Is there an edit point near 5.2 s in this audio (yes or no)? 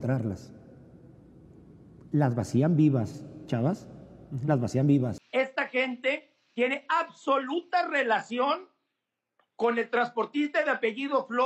yes